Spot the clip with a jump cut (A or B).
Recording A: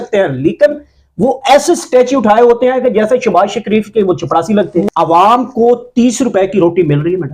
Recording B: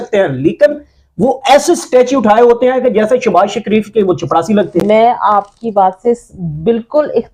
A